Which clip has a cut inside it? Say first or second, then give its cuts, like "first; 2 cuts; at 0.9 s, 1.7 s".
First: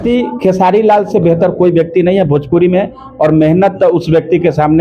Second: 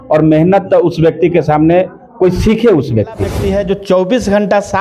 second; 1 cut; at 3.3 s